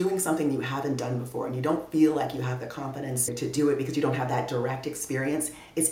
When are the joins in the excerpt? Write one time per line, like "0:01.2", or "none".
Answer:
0:03.3